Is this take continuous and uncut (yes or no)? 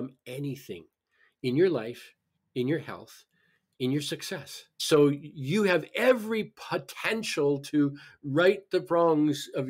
no